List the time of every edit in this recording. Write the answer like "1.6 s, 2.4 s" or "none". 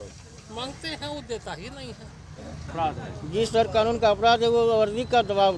2.6 s